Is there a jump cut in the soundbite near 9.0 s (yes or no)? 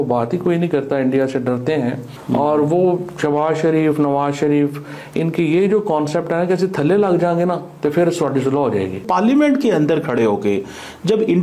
yes